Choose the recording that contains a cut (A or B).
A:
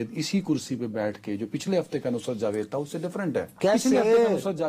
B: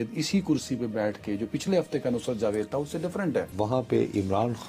B